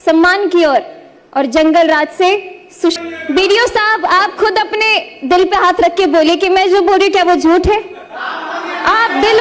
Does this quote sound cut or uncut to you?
cut